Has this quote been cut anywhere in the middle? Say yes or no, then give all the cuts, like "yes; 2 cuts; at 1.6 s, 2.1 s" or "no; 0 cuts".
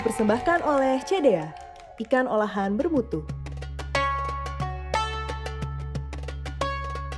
yes; 1 cut; at 3.7 s